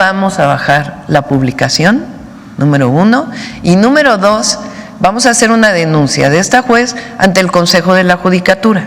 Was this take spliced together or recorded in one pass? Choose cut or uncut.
uncut